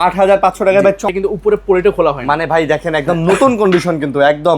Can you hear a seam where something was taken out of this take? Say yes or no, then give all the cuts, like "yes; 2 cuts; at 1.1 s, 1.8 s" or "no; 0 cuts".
yes; 1 cut; at 1.0 s